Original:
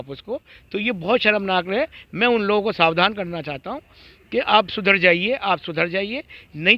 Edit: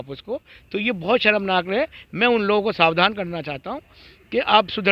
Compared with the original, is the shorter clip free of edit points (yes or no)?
yes